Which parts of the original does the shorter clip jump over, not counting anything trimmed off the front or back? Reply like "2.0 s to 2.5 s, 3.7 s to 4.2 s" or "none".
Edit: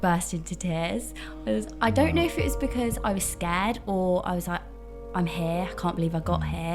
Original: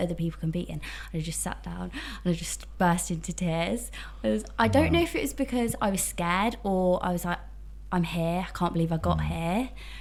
none